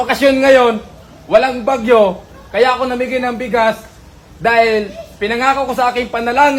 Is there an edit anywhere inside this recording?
no; 0 cuts

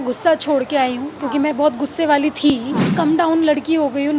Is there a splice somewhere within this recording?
yes; 1 cut; at 2.9 s

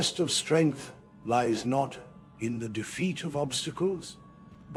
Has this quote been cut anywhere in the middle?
no; 0 cuts

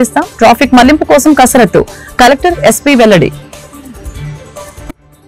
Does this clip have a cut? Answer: yes; 1 cut; at 3.3 s

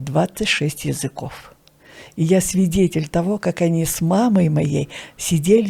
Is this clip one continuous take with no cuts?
yes; 0 cuts

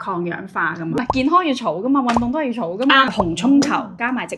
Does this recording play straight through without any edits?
no; 1 cut; at 3.1 s

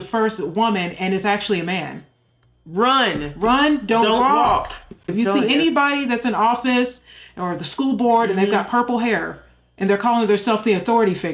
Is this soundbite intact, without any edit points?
yes; 0 cuts

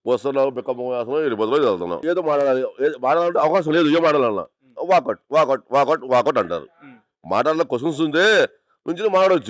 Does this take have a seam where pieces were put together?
yes; 1 cut; at 2.0 s

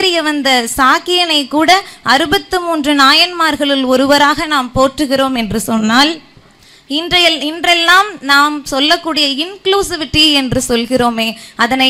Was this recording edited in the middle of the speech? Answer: no; 0 cuts

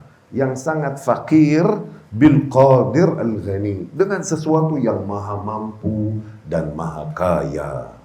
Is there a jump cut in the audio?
no; 0 cuts

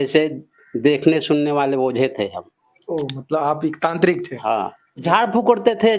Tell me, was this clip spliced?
yes; 1 cut; at 5.0 s

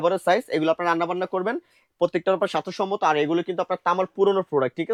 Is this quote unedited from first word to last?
yes; 0 cuts

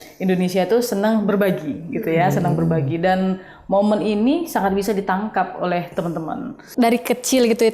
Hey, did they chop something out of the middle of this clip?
yes; 1 cut; at 6.6 s

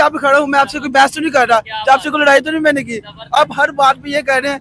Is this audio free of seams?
yes; 0 cuts

